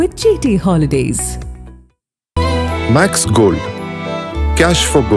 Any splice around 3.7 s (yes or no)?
no